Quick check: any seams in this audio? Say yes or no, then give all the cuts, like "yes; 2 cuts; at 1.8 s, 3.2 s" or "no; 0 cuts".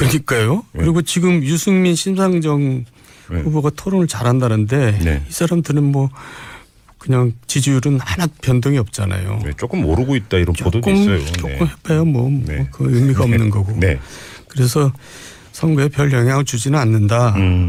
no; 0 cuts